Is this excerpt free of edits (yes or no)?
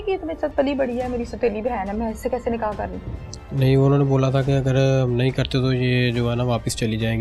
yes